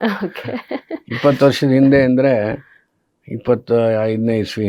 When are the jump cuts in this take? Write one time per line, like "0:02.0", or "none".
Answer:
none

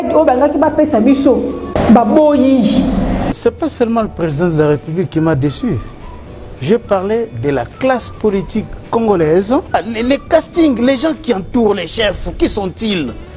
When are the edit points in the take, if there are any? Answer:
0:01.8
0:03.3
0:09.7

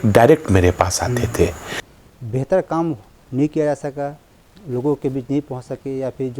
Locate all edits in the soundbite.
0:01.8

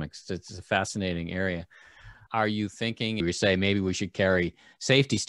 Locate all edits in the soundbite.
0:02.2
0:03.2

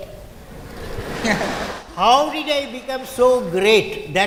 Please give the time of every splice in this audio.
none

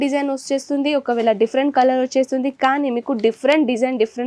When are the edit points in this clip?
none

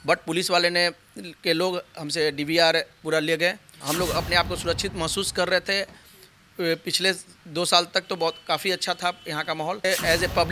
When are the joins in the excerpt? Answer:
0:03.7
0:09.8

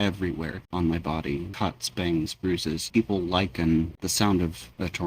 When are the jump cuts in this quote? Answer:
0:01.5
0:02.8

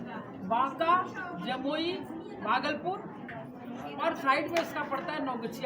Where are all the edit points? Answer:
none

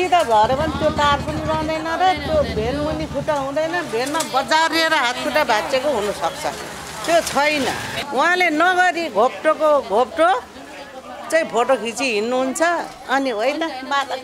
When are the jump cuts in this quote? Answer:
0:07.9

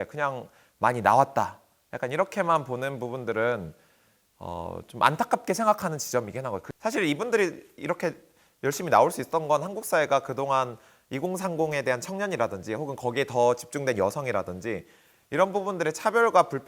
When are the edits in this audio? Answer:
0:06.6

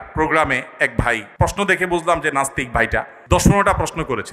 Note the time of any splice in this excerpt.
0:01.3
0:03.1

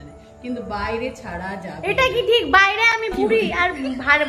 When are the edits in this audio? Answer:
none

